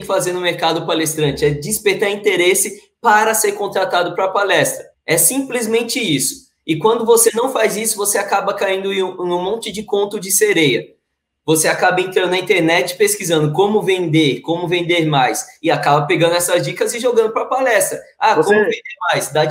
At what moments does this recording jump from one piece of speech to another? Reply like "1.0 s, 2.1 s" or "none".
4.9 s